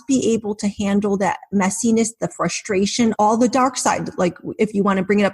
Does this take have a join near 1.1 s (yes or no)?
no